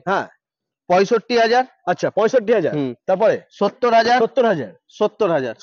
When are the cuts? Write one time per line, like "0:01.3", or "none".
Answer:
none